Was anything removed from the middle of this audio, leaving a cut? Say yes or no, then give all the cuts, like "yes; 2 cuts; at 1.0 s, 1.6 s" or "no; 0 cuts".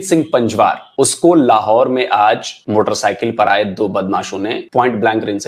yes; 3 cuts; at 0.8 s, 2.5 s, 4.6 s